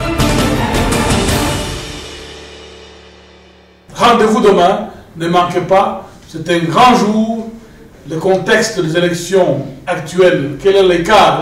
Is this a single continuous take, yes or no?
no